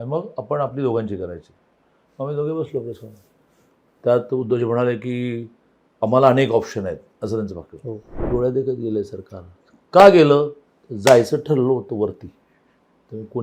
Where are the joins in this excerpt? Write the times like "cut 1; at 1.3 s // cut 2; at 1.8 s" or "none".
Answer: cut 1; at 8.2 s